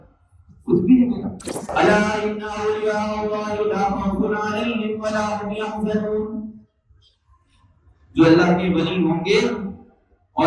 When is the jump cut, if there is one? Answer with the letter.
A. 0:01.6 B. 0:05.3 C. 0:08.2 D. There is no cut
A